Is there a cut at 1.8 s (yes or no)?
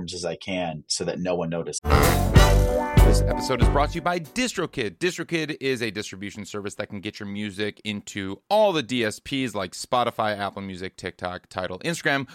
yes